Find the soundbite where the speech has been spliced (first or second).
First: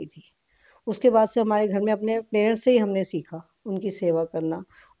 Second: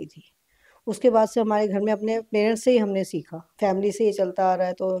second